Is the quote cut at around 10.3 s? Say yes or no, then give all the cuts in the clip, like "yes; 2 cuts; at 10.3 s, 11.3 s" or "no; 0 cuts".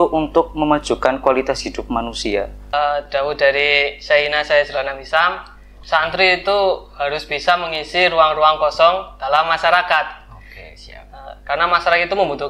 no; 1 cut; at 2.7 s